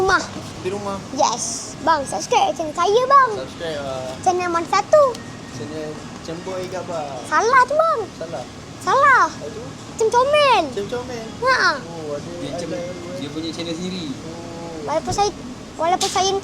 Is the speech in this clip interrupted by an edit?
yes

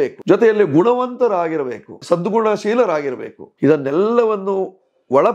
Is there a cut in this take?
no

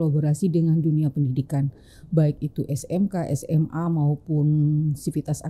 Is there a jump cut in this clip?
no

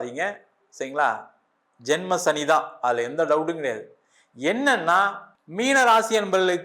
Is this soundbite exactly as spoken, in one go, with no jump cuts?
no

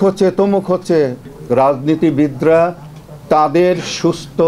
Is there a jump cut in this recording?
yes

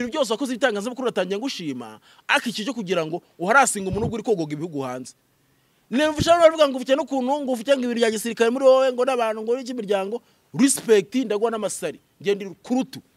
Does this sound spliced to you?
no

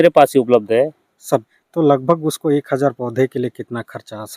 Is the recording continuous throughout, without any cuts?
no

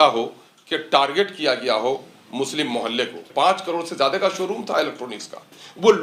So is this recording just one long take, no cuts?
no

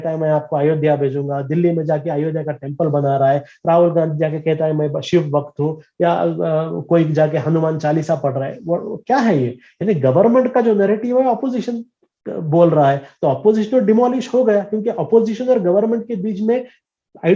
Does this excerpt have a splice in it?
no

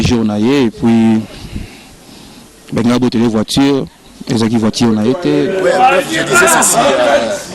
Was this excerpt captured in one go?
no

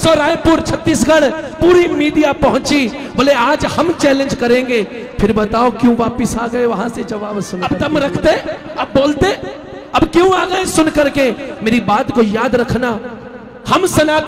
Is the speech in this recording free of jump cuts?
no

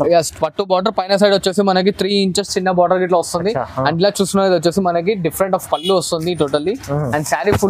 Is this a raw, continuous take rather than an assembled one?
yes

